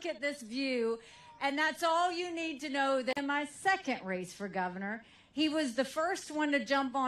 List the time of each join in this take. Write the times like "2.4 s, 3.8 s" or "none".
none